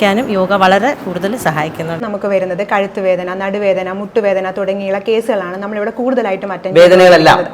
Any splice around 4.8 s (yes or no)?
no